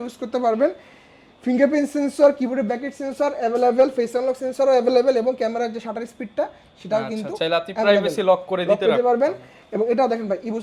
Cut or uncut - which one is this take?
uncut